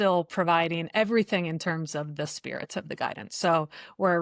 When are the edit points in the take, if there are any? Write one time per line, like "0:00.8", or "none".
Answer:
none